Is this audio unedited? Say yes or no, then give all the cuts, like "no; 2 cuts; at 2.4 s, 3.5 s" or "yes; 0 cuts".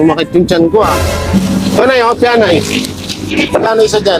no; 1 cut; at 1.3 s